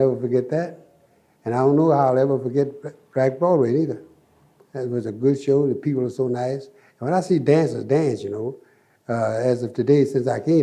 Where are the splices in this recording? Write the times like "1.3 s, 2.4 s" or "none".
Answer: 5.1 s